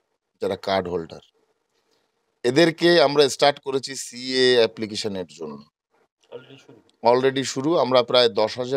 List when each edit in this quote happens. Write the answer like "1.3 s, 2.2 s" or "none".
none